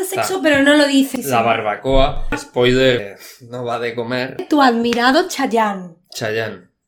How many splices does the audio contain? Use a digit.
4